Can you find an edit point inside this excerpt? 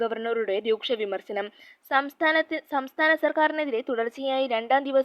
no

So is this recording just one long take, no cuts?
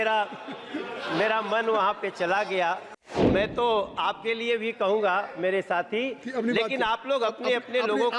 no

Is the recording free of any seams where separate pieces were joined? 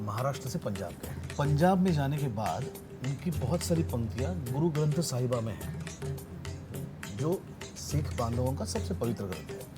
no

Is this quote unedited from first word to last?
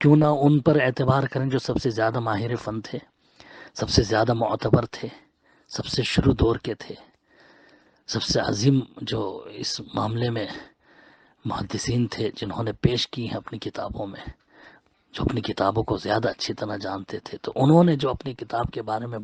yes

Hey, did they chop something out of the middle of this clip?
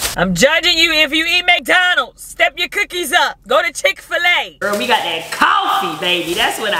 yes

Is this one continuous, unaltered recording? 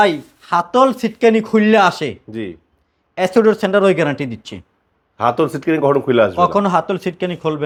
yes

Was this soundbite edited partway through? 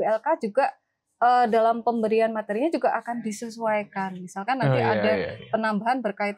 no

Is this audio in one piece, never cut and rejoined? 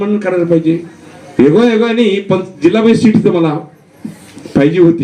yes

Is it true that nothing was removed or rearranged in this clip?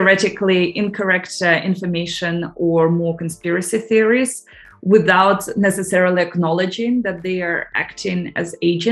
yes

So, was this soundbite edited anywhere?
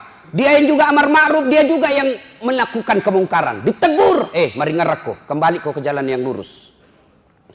no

